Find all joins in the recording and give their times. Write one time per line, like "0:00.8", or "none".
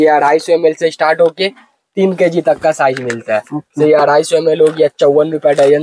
none